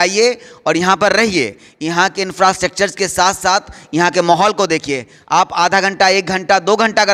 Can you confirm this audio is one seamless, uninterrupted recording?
yes; 0 cuts

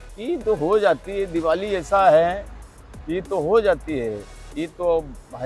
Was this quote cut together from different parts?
no; 0 cuts

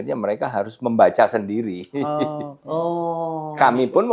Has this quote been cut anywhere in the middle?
no; 0 cuts

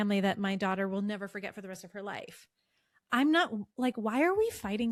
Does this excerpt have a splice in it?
no; 0 cuts

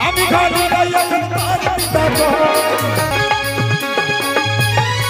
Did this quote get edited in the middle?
yes; 1 cut; at 3.1 s

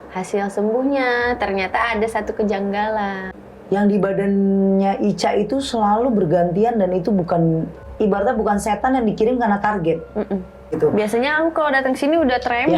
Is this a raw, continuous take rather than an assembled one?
no; 3 cuts; at 3.2 s, 7.8 s, 10.6 s

